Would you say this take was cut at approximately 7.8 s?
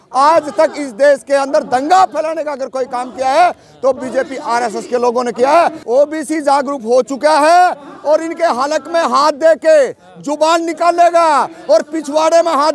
no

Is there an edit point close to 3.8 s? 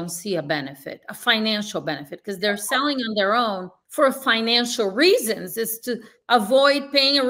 yes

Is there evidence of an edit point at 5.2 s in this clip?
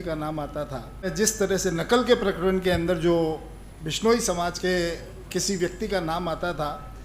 no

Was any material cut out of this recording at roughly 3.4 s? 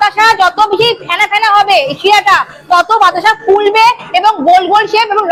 no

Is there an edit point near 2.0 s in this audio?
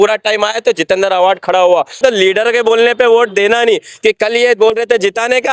yes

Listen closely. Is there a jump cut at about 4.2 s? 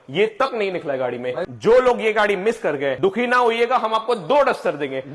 no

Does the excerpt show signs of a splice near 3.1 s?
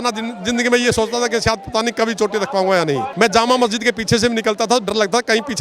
yes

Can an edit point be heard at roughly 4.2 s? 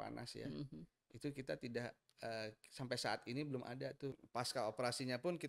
yes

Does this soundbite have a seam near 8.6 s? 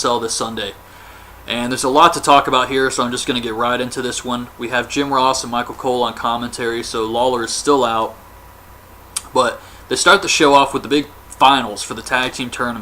no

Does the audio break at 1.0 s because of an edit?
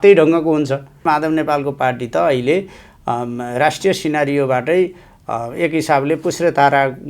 yes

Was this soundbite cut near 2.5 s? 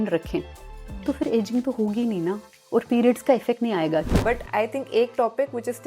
yes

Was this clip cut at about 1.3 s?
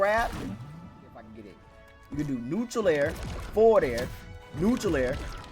yes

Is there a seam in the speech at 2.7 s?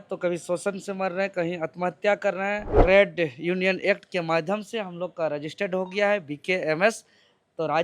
yes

